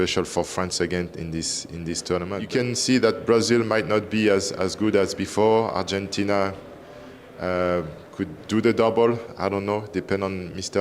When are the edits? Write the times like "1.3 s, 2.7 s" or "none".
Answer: 2.3 s